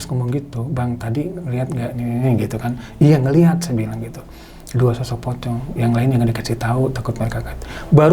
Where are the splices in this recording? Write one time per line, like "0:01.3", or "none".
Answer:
none